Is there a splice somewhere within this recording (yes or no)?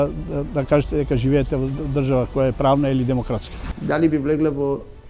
yes